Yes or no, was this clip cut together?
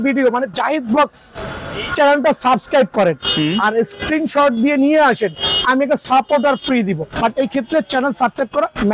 yes